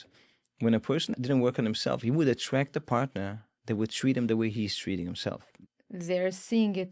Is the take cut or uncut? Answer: cut